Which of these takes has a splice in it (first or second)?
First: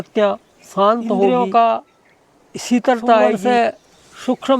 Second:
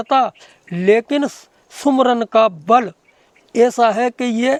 first